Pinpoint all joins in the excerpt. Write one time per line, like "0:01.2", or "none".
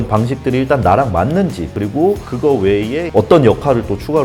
0:01.6